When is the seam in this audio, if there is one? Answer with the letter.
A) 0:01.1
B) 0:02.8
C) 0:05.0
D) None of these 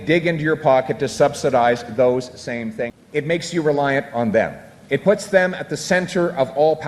B